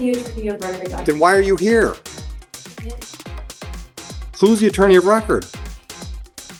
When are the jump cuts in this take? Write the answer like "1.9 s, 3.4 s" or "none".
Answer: none